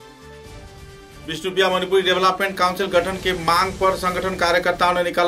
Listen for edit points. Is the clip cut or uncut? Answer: cut